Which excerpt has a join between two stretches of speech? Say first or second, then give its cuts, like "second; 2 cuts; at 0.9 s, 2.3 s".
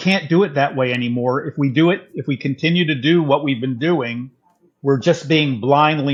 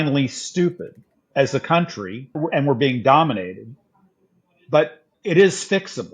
second; 3 cuts; at 1.2 s, 2.3 s, 5.1 s